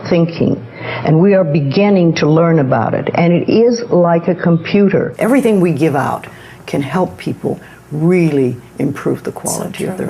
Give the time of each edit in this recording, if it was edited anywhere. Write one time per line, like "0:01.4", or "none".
0:05.1